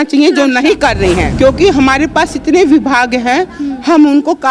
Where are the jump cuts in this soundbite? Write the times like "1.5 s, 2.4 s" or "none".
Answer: 1.3 s